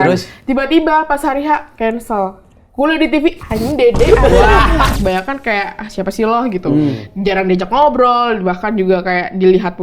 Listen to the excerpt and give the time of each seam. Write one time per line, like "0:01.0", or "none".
0:04.9